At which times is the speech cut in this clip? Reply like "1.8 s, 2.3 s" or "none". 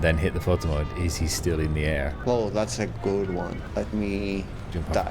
2.2 s, 3.6 s